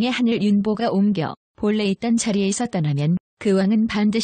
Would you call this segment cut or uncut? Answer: cut